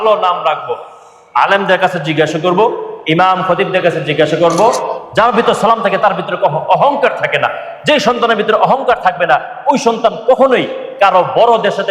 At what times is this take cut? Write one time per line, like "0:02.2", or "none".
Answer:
0:04.9